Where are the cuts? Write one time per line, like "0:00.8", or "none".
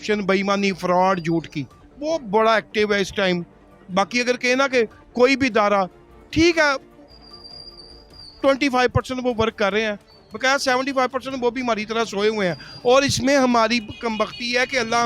none